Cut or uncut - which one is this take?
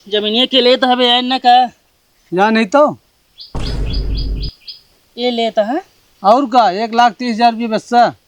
cut